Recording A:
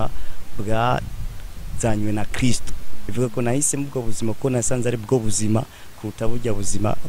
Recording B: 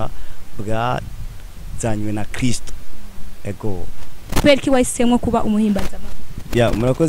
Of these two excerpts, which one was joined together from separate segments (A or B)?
A